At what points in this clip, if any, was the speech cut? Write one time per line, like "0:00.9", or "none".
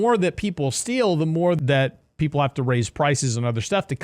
0:01.6